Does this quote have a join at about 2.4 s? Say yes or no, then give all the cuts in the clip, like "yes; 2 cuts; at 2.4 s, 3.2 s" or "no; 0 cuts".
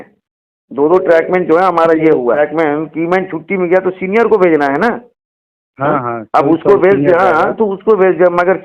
yes; 1 cut; at 2.4 s